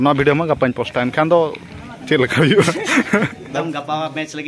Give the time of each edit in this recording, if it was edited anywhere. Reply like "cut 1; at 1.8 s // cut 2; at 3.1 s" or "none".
cut 1; at 3.4 s